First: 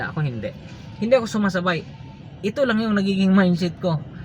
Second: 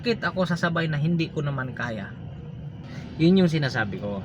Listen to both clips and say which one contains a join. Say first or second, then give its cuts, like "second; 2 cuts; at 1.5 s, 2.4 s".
second; 1 cut; at 3.0 s